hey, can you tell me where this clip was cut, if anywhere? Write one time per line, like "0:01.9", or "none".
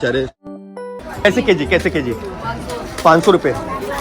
0:01.0